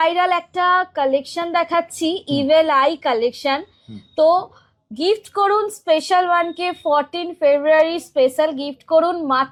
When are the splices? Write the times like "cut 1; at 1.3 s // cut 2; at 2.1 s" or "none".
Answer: none

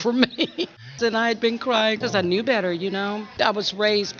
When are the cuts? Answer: cut 1; at 1.0 s // cut 2; at 2.0 s // cut 3; at 3.3 s

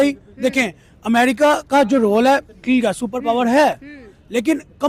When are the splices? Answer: none

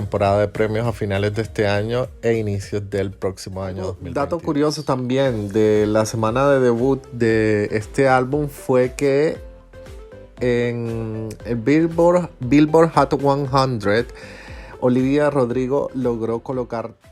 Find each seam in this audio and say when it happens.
cut 1; at 4.0 s

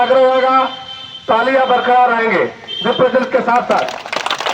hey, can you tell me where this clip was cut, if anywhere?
none

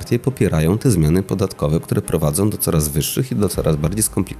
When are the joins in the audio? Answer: none

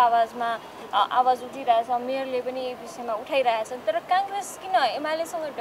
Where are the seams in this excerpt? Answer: none

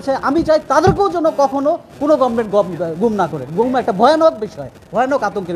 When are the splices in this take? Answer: none

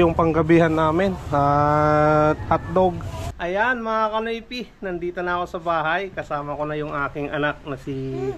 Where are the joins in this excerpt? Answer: cut 1; at 3.4 s

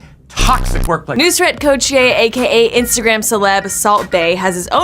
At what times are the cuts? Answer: cut 1; at 1.1 s

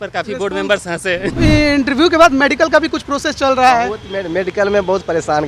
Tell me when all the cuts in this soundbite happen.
cut 1; at 1.3 s

